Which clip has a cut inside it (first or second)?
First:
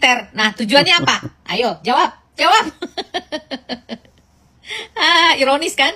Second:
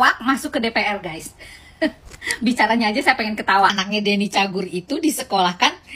second